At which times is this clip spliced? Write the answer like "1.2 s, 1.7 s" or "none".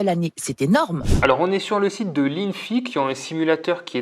1.1 s